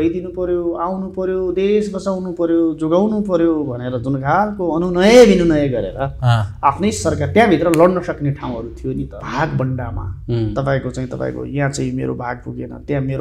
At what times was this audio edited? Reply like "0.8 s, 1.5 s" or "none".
9.2 s

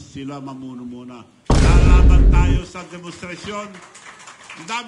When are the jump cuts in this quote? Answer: 1.3 s

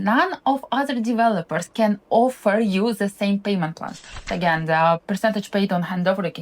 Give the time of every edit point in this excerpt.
4.3 s

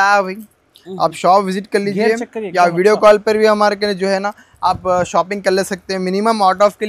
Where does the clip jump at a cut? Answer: none

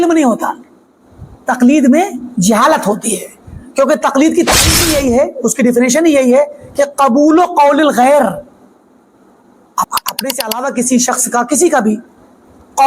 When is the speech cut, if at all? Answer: 9.9 s

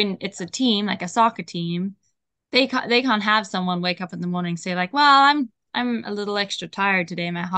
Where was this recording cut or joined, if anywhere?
none

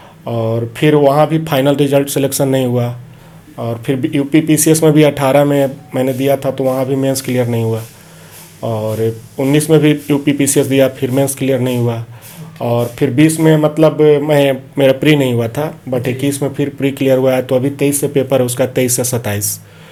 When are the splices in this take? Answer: none

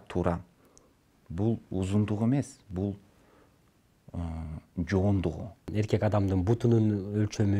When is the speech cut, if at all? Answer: 5.7 s

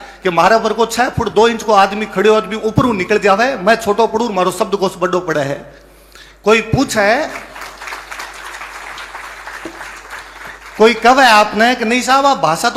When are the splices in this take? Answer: none

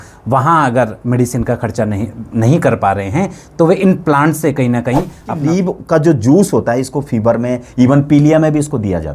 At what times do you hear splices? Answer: 5.4 s

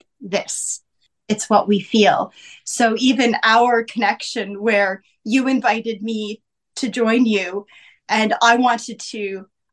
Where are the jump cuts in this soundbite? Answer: 1.0 s

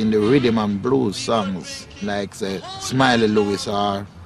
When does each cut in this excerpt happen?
none

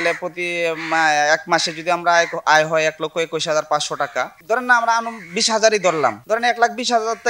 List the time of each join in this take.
6.2 s

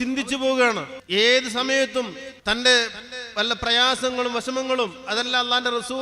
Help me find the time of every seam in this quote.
0.9 s, 2.3 s

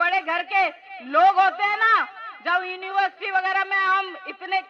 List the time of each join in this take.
none

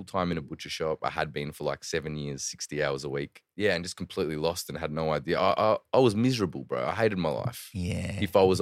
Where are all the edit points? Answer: 1.0 s, 3.4 s

